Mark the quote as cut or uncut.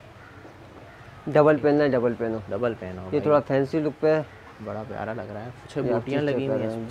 uncut